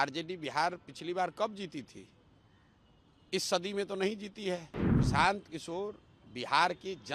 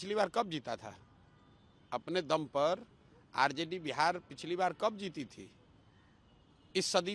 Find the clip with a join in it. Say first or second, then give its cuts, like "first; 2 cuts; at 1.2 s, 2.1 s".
first; 1 cut; at 4.8 s